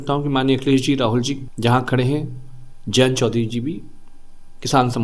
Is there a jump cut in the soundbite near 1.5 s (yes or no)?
yes